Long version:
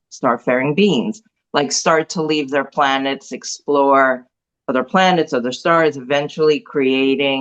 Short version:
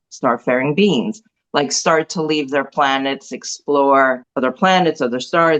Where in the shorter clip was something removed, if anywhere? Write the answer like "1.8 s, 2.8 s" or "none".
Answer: 4.3 s